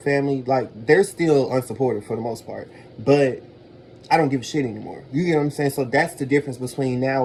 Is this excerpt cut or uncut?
uncut